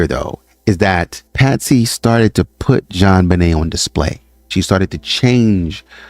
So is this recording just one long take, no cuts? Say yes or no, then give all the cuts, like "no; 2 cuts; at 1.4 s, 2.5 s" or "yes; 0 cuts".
no; 2 cuts; at 1.2 s, 4.4 s